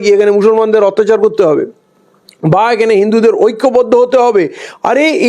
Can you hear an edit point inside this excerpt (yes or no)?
no